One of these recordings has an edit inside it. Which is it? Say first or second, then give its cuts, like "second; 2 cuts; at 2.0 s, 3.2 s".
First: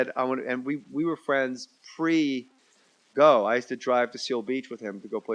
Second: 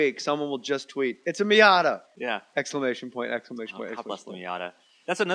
second; 1 cut; at 3.8 s